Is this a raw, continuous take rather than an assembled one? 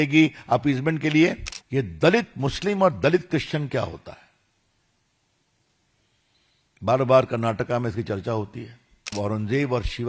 no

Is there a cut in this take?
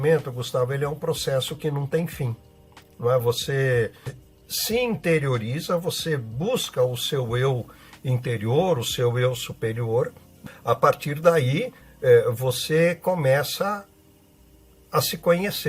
yes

